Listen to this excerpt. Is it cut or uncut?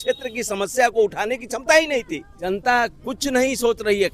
cut